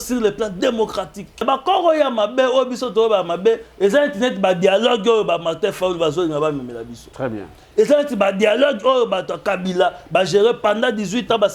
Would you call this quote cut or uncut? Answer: cut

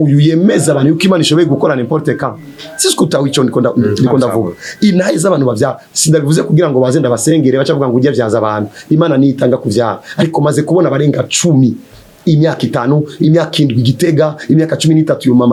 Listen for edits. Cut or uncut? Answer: uncut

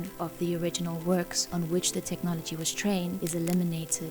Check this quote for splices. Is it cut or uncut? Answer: cut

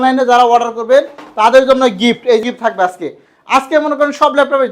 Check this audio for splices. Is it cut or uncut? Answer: cut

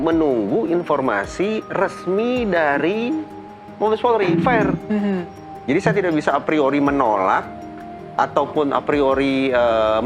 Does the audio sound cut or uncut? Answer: uncut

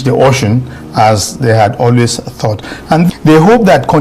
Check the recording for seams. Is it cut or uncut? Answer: cut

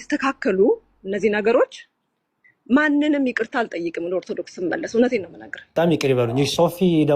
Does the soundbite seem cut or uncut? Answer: cut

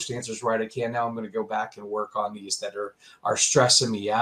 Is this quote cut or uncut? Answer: uncut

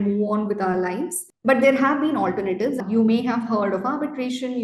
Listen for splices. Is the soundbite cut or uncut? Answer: cut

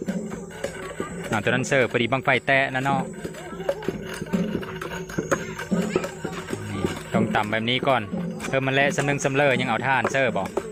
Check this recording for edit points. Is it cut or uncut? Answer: uncut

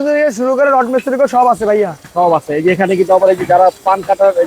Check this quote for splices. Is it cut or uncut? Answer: uncut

